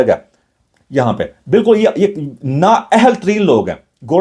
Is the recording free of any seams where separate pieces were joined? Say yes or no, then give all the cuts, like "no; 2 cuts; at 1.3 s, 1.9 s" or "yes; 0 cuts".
yes; 0 cuts